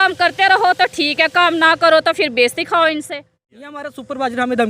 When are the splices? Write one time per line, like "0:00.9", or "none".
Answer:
0:03.7